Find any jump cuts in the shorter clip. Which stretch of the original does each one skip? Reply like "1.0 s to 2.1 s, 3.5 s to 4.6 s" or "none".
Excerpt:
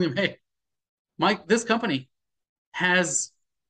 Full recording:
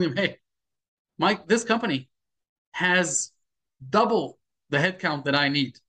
none